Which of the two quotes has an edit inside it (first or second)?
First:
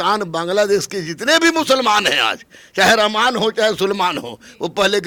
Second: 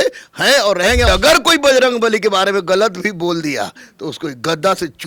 second